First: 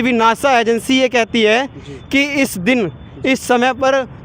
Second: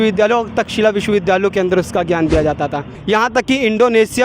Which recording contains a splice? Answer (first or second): second